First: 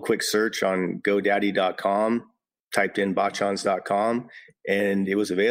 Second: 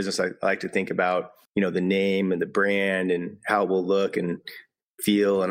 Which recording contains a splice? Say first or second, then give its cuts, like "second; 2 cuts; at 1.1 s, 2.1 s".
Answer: second; 1 cut; at 1.4 s